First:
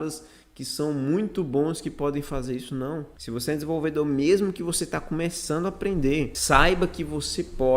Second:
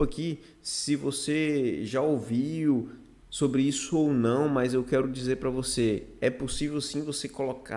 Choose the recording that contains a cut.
first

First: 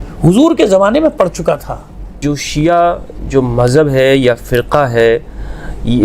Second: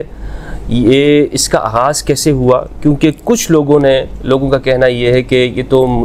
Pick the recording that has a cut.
first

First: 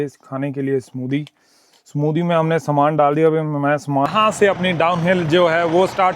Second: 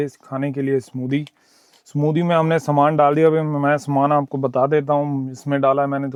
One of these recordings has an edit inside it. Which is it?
first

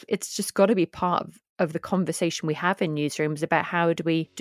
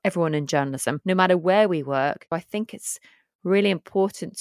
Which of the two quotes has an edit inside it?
second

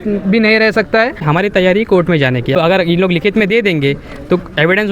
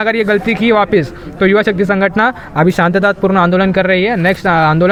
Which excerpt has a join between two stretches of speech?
first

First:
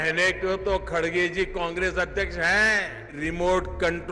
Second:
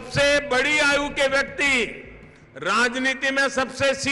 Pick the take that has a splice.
first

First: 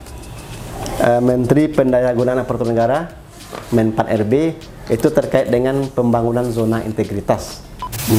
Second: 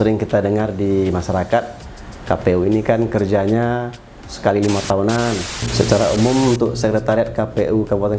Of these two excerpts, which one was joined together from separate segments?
second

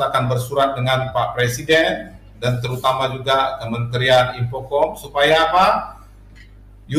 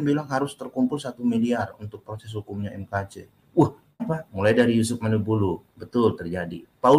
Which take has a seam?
second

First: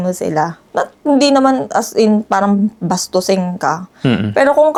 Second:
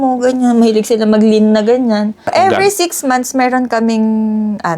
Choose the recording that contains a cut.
second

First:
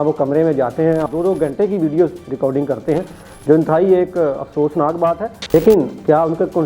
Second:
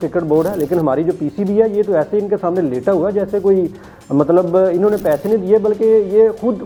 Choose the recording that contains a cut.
first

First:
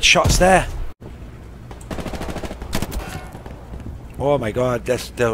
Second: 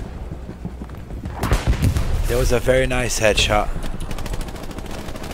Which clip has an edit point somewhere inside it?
first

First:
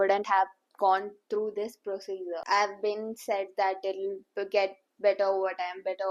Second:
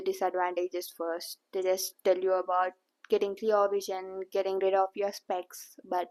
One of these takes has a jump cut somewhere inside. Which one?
first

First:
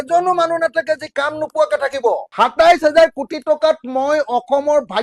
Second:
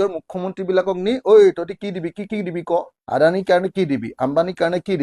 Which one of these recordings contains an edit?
first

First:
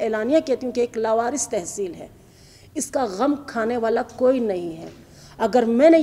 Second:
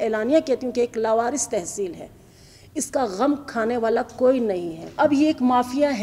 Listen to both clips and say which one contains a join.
second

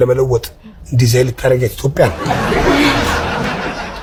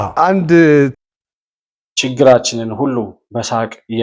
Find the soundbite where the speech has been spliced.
second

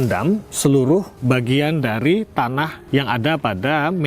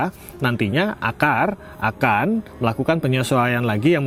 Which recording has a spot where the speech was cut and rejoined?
first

